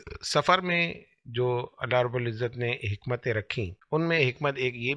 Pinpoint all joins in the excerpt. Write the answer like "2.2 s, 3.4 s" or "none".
3.8 s